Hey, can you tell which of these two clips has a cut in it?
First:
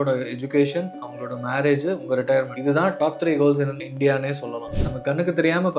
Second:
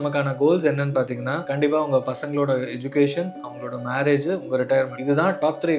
first; 1 cut; at 4.7 s

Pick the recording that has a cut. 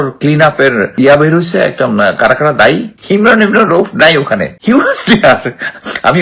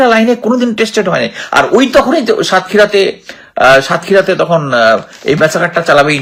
first; 3 cuts; at 0.9 s, 2.9 s, 4.5 s

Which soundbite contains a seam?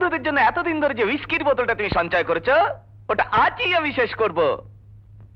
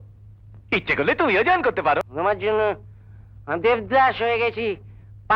second; 1 cut; at 2.0 s

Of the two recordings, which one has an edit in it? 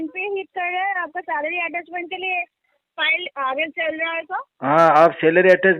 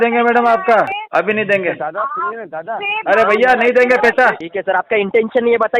second; 2 cuts; at 1.0 s, 4.5 s

